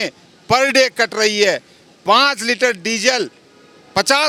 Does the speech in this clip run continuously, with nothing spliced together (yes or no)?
yes